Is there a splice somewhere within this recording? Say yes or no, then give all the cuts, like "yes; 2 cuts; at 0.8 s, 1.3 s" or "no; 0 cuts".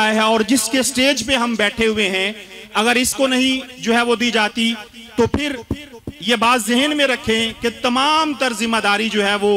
no; 0 cuts